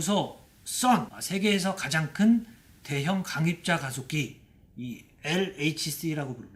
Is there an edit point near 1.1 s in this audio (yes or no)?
yes